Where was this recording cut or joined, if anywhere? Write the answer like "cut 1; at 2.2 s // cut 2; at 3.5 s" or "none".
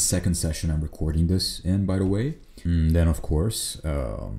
cut 1; at 2.5 s